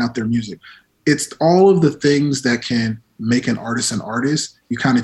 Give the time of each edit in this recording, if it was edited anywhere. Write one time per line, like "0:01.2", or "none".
none